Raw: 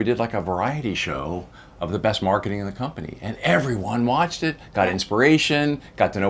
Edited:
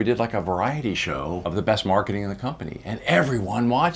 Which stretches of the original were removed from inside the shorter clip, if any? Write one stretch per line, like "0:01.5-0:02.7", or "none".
0:01.4-0:01.8

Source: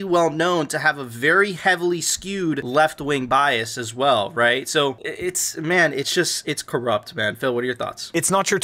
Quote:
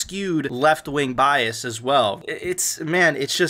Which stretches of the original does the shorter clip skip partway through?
0:04.3-0:05.0

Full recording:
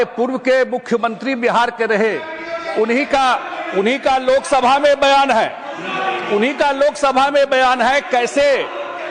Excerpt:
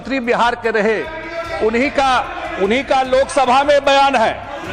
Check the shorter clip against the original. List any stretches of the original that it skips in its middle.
none

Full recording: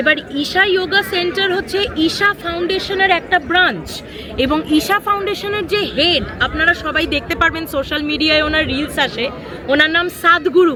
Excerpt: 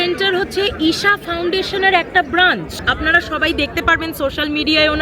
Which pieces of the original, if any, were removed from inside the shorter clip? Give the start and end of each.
0:04.0-0:06.4

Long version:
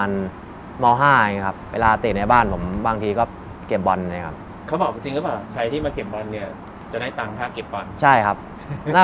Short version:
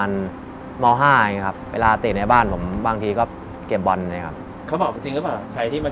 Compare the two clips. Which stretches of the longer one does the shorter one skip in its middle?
none

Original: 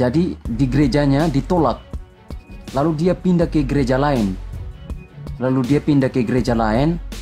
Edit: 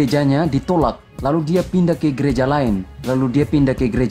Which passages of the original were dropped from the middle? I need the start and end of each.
0:01.9-0:02.6
0:04.4-0:05.3

